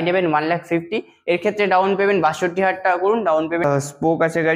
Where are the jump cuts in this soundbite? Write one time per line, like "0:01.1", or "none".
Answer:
0:03.6